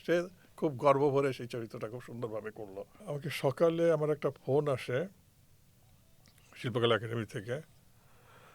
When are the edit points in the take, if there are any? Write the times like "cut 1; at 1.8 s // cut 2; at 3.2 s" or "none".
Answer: cut 1; at 2.9 s